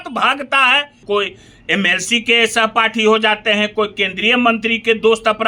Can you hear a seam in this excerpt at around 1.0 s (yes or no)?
yes